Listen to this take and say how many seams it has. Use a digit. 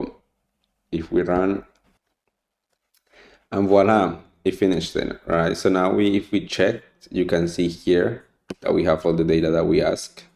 1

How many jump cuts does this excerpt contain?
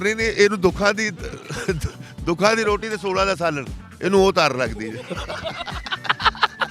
0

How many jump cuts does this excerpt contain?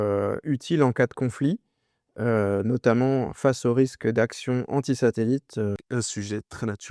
1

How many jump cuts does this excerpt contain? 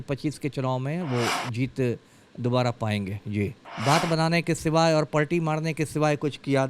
1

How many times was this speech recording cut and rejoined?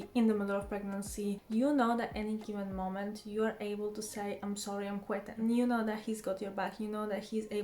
2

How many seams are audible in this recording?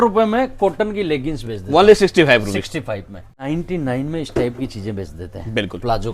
1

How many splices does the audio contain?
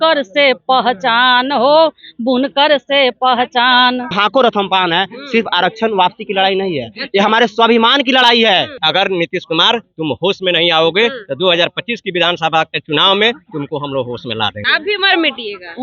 3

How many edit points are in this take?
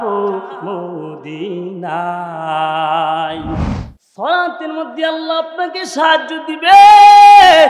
1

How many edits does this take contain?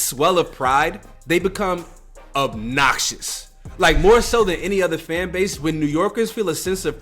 1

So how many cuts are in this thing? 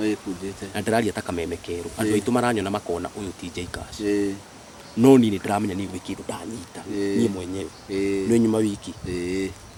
0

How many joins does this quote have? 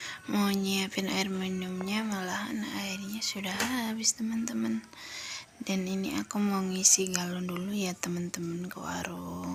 0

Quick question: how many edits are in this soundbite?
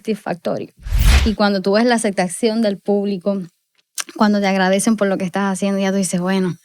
1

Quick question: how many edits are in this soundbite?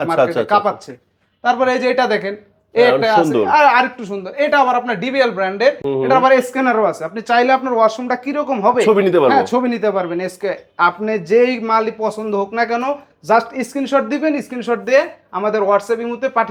0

